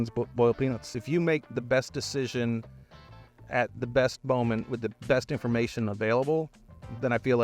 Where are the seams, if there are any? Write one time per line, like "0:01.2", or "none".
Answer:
0:00.9